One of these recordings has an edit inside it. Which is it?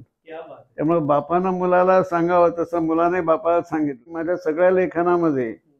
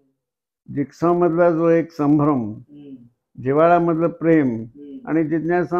first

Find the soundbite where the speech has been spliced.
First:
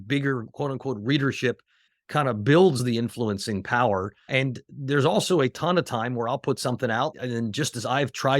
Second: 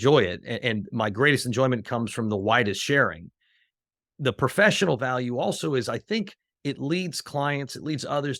first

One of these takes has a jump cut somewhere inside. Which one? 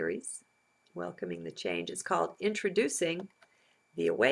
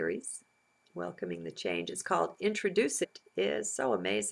first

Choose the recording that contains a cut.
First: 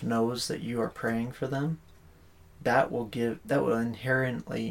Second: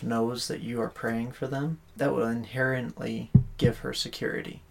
second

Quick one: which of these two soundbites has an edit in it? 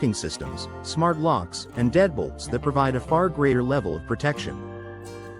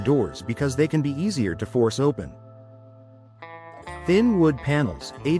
first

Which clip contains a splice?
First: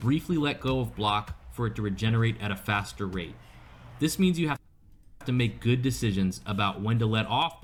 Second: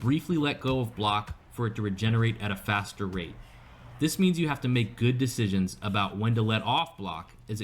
second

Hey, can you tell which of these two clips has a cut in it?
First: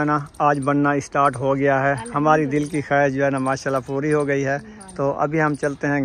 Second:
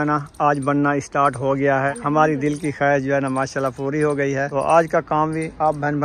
second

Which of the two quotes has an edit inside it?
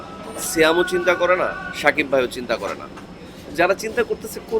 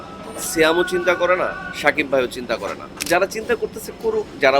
second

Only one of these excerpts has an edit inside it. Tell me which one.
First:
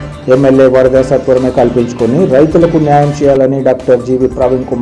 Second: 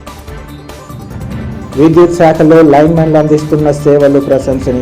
second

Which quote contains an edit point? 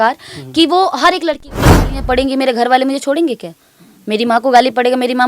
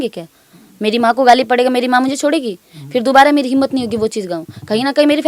first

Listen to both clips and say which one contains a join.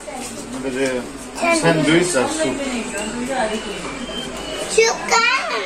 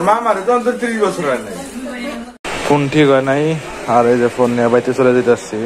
second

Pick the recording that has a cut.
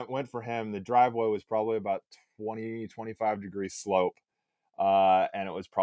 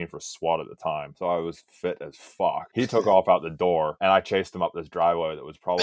second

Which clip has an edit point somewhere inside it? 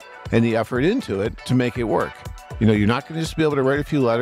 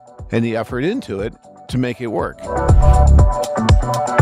first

